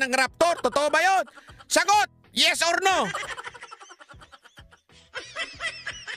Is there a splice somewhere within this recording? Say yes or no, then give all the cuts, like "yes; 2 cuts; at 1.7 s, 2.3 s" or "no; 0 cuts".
no; 0 cuts